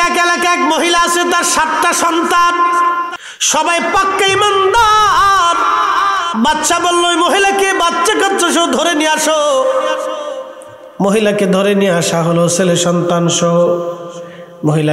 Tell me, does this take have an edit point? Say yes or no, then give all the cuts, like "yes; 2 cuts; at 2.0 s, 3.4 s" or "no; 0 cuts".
yes; 1 cut; at 3.1 s